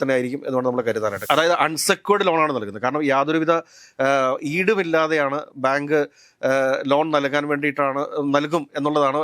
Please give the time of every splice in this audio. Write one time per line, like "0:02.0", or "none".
0:01.2